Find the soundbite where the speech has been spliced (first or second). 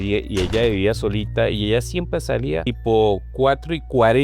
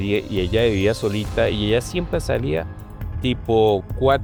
first